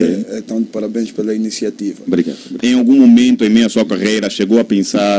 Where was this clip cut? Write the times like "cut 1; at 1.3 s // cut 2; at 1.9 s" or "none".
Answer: cut 1; at 2.6 s

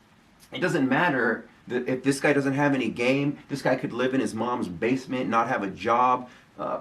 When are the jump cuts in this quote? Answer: none

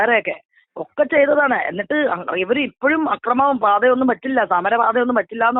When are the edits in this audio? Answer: none

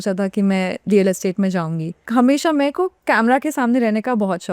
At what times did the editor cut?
cut 1; at 2.0 s

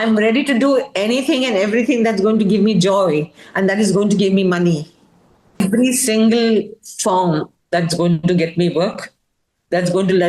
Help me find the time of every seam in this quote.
cut 1; at 5.6 s

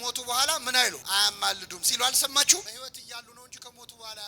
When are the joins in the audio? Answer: cut 1; at 1.0 s // cut 2; at 2.7 s

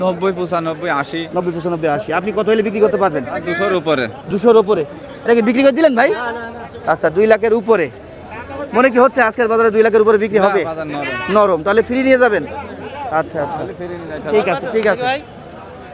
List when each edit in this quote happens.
none

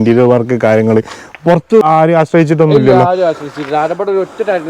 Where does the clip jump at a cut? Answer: cut 1; at 1.8 s

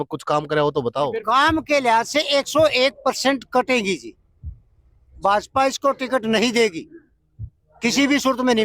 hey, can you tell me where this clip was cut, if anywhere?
cut 1; at 1.2 s

